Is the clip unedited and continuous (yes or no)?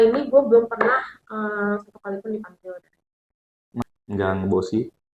no